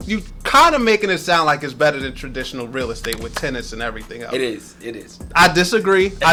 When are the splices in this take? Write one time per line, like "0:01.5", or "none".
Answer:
none